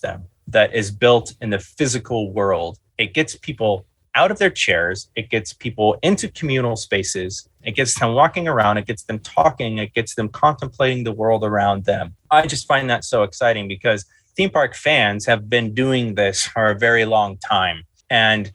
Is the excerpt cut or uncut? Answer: cut